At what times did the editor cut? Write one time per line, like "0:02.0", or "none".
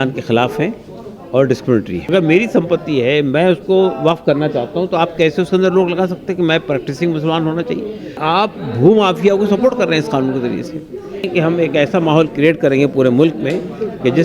0:02.0
0:08.2
0:11.3